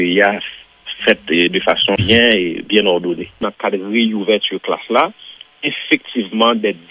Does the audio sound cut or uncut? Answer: cut